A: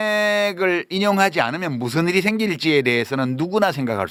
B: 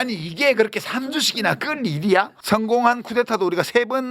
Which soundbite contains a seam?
B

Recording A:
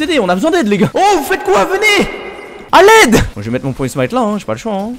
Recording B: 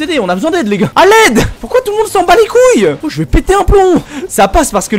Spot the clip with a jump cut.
B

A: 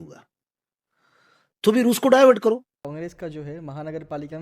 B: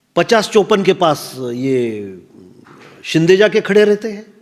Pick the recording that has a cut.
A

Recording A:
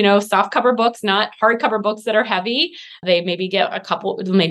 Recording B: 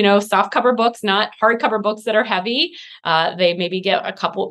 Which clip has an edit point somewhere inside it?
A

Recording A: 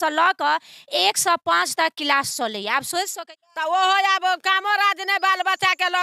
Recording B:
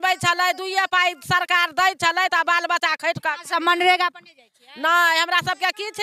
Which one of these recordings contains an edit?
A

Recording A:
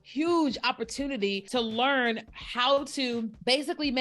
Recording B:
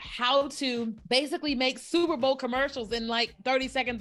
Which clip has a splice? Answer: A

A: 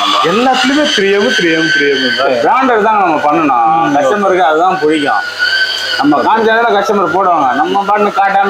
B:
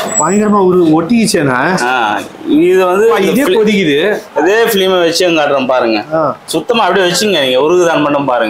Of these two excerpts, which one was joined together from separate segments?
B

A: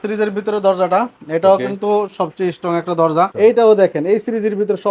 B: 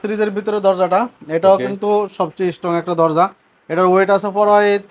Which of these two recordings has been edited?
A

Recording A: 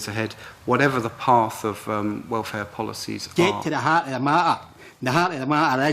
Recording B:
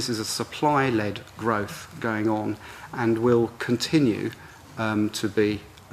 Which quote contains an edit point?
A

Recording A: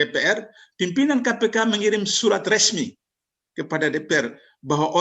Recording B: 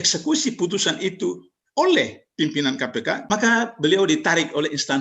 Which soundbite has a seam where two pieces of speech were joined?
B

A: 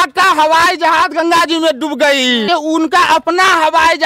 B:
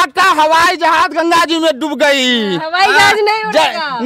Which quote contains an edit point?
A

